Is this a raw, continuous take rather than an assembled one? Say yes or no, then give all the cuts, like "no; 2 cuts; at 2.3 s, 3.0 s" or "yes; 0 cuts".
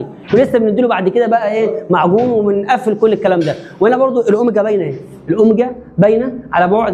yes; 0 cuts